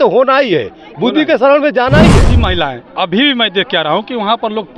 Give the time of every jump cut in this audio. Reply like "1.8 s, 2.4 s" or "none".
2.4 s